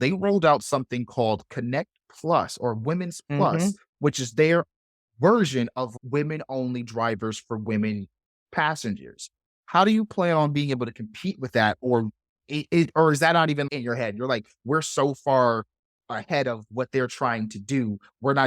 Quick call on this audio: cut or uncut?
cut